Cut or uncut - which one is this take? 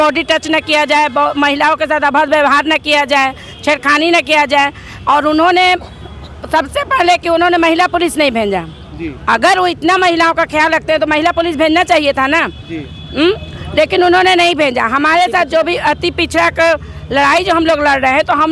uncut